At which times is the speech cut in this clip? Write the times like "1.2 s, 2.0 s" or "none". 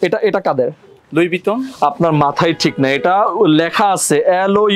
1.0 s